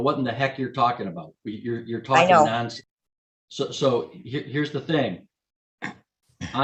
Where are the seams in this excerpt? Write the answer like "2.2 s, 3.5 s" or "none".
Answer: none